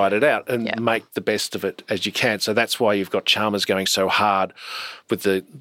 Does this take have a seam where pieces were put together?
no; 0 cuts

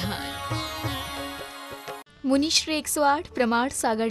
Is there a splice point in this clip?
yes; 1 cut; at 2.1 s

